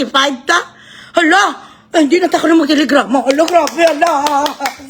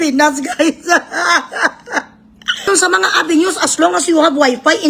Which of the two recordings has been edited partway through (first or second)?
second